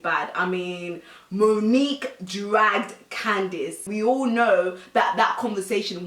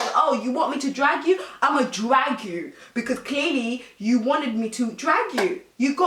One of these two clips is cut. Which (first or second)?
first